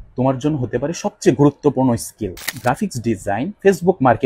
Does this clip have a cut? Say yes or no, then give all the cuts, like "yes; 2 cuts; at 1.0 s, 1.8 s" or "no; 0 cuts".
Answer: yes; 1 cut; at 2.5 s